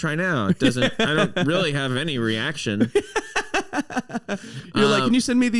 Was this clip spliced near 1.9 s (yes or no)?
no